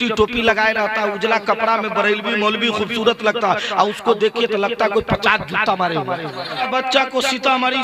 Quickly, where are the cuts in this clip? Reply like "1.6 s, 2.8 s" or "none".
6.6 s